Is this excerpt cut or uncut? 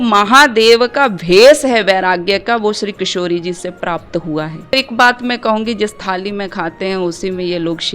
cut